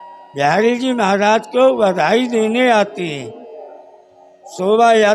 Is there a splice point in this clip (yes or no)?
no